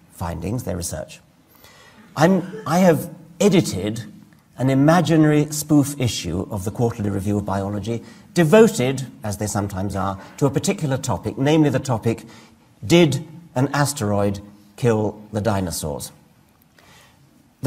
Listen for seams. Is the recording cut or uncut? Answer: cut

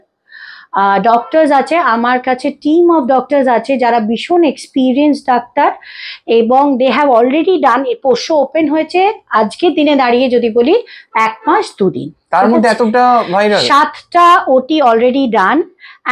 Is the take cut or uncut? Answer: uncut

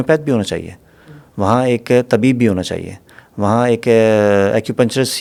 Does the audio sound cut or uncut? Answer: uncut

